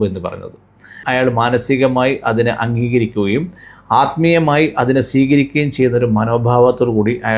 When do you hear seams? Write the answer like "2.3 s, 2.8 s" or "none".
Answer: 1.0 s